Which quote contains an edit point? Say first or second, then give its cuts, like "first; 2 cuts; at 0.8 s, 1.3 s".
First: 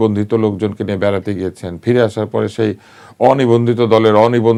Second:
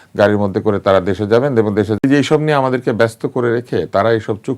second; 1 cut; at 2.0 s